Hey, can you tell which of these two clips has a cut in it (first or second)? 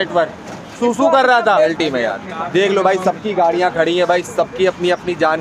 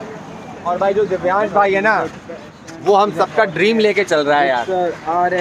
first